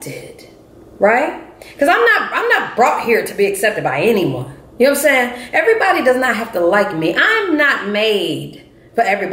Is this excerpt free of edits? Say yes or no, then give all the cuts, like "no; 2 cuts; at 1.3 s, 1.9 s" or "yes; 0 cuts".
yes; 0 cuts